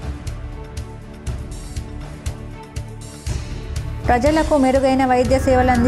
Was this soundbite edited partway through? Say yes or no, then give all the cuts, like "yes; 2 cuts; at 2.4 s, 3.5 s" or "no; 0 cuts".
no; 0 cuts